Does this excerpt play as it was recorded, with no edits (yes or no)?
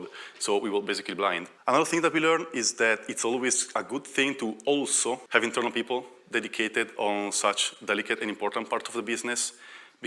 no